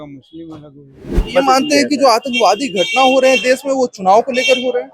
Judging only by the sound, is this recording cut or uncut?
cut